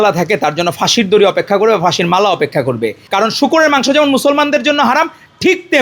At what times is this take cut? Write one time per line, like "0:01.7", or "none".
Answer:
0:03.1